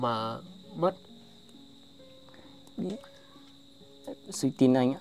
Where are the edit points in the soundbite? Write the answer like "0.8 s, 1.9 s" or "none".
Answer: none